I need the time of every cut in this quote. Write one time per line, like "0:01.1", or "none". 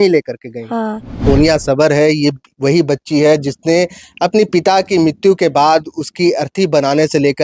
0:01.2

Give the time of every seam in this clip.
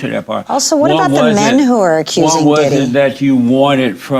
none

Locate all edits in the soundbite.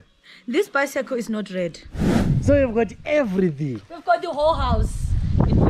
0:02.2

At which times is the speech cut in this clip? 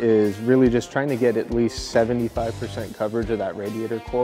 none

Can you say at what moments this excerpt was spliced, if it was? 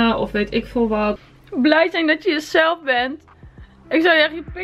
0:01.2

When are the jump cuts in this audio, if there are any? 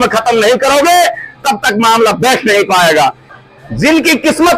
0:03.2

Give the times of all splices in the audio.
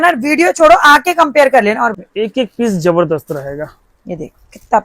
0:02.0

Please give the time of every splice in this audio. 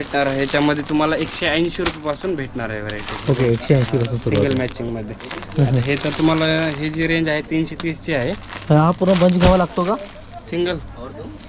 none

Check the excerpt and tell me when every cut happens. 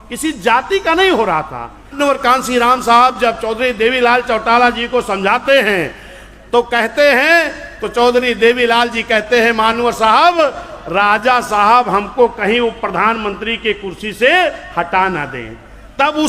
0:01.9

